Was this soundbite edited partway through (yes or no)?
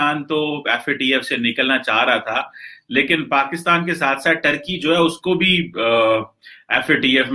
no